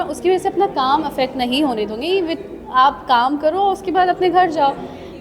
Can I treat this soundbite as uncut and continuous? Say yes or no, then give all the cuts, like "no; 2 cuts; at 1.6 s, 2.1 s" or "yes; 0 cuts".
yes; 0 cuts